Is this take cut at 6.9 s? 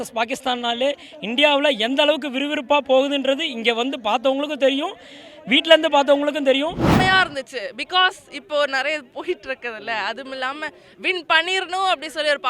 yes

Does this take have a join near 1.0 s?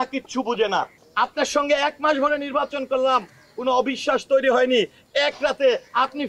yes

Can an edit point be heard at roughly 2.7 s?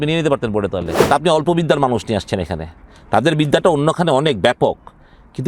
no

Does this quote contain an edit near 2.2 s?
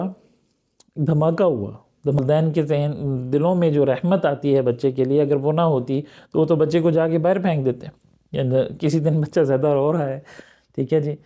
yes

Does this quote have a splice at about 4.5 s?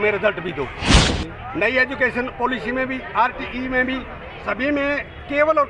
no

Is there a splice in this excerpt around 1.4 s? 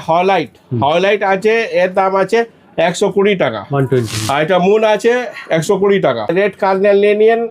no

